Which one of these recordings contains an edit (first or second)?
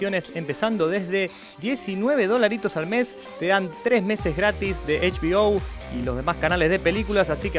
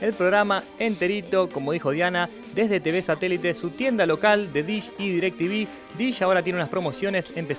first